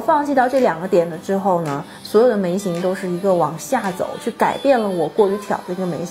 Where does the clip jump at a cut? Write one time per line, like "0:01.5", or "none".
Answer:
none